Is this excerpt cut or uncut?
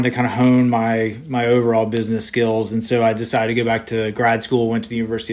uncut